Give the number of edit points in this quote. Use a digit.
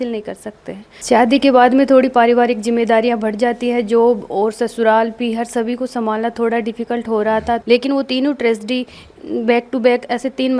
2